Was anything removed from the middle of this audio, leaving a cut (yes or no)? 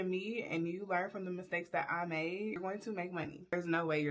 yes